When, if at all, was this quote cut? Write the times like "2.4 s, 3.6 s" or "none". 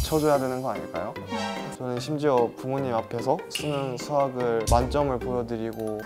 1.7 s